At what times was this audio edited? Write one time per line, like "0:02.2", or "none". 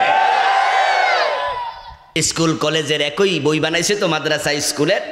0:02.0